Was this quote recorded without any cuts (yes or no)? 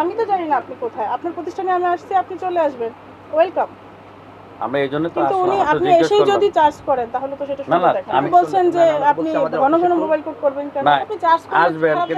no